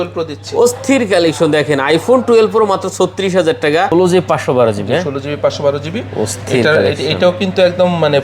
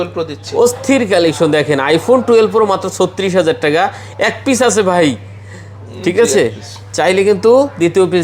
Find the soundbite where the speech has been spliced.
first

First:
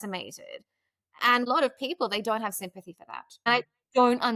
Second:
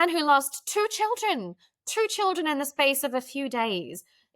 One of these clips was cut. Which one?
first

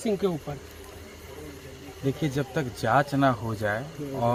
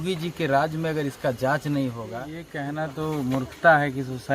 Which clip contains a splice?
second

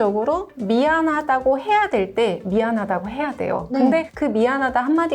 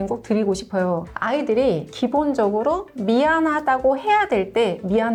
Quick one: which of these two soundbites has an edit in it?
first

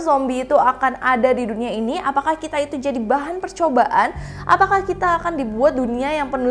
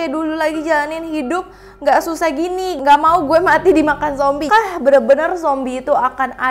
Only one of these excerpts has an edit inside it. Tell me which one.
second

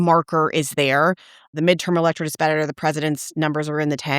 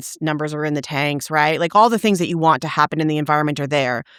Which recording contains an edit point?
first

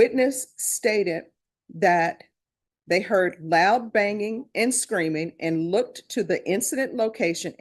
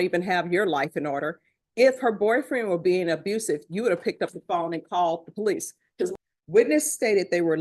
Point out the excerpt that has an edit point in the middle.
second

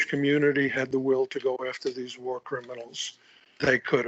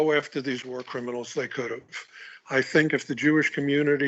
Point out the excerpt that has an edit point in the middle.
first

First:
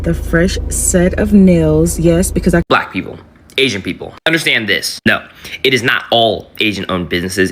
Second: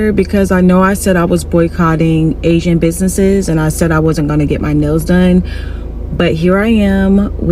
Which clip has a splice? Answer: first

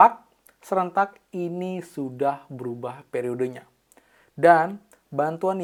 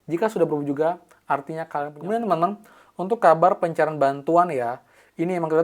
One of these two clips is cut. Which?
second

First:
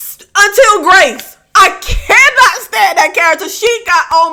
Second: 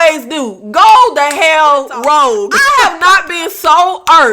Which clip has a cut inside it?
second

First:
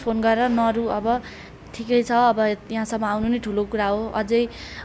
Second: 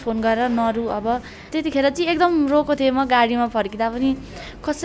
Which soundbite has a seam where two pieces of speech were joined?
second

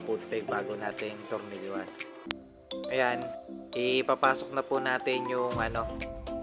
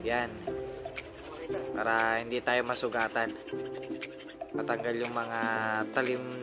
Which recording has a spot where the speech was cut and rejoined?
first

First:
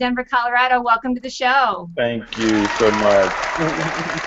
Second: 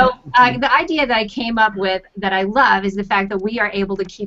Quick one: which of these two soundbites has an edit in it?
second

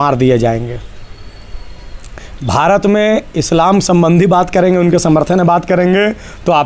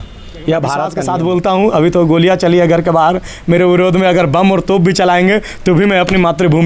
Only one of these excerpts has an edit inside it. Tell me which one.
second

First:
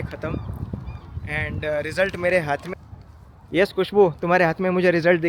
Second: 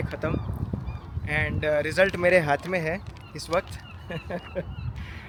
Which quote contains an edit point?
first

